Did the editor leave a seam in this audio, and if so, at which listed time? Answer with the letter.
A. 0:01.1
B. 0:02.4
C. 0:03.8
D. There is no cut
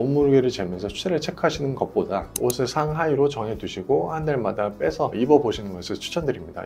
D